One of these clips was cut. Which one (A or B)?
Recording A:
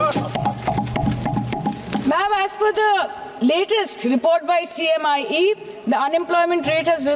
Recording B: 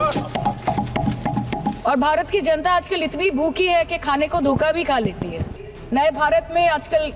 B